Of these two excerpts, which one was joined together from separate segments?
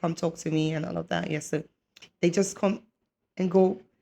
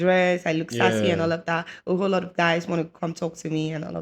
first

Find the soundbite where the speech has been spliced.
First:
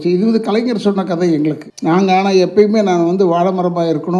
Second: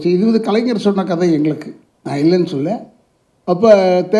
first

